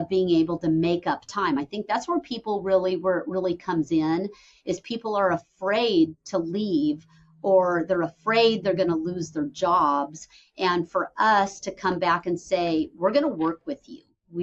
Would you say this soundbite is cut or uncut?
uncut